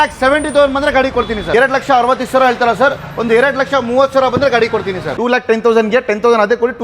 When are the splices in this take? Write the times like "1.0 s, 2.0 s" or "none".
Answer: 1.4 s, 5.1 s

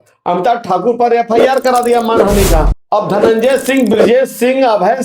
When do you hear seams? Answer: 2.8 s

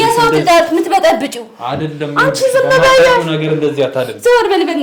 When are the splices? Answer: none

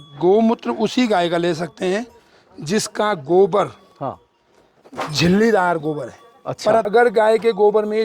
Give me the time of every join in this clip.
6.9 s

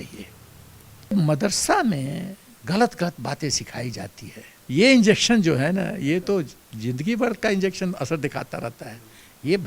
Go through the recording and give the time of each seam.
1.1 s, 4.6 s

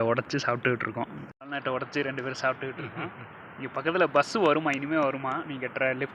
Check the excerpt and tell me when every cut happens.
1.2 s

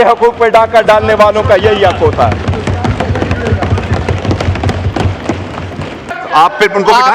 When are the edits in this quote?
6.1 s

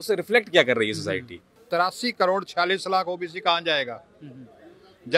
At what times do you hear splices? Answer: 1.6 s

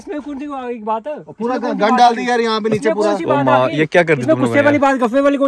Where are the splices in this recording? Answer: none

